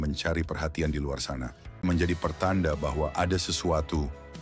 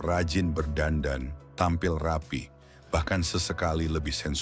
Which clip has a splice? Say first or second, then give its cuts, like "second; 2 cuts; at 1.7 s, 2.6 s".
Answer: first; 1 cut; at 1.8 s